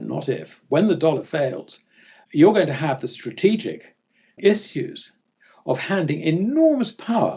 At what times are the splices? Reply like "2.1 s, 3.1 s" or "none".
2.1 s, 4.4 s